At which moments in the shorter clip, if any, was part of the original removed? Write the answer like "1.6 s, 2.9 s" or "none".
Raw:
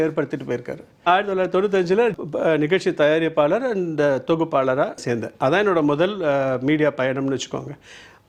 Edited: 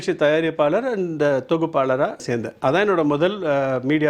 none